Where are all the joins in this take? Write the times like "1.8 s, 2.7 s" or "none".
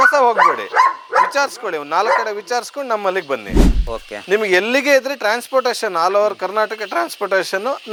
none

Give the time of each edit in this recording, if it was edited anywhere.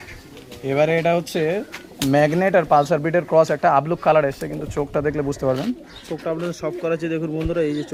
none

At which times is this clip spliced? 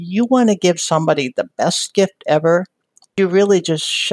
3.1 s

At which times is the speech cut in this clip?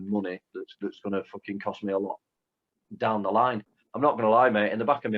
3.7 s

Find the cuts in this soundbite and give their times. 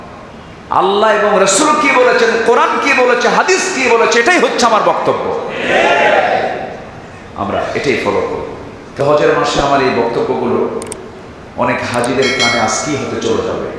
8.9 s

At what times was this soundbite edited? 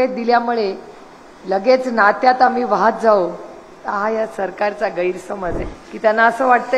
5.6 s

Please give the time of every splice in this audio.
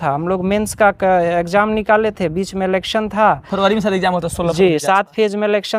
none

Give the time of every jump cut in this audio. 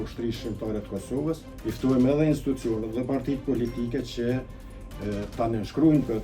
1.5 s

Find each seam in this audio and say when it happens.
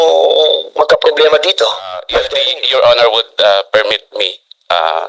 2.2 s

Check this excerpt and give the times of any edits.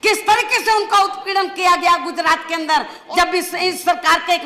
3.0 s

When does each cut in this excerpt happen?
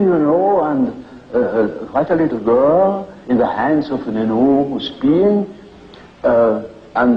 4.8 s

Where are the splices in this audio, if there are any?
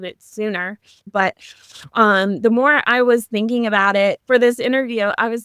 1.1 s

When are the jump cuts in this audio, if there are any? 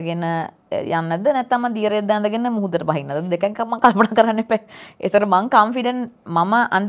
none

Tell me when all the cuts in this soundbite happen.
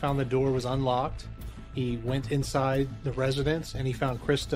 none

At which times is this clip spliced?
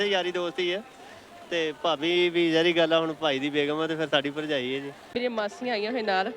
5.1 s

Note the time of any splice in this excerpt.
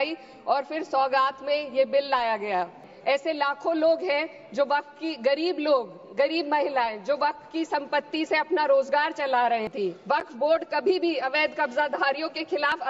2.9 s, 9.7 s

